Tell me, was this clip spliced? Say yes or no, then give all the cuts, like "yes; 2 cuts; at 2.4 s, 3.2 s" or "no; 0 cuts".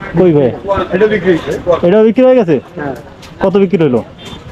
no; 0 cuts